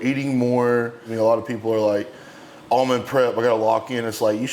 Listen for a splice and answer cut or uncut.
cut